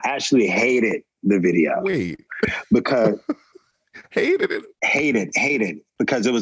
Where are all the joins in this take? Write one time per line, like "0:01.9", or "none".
0:04.6